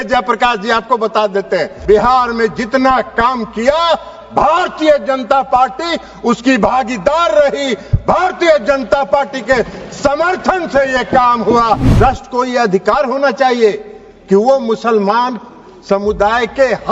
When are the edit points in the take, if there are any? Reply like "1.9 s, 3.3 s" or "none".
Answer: 1.7 s, 11.9 s